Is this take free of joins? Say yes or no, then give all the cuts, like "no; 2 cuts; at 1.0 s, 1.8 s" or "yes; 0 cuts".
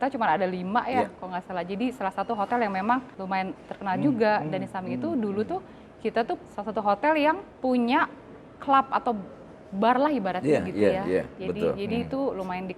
no; 3 cuts; at 3.1 s, 6.5 s, 7.5 s